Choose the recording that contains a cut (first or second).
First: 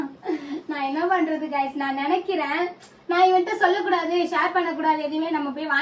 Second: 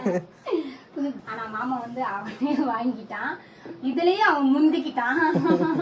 second